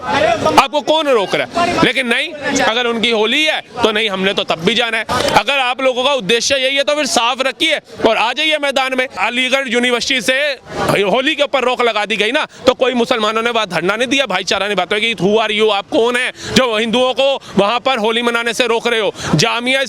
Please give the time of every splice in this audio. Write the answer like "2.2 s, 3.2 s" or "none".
5.0 s, 9.2 s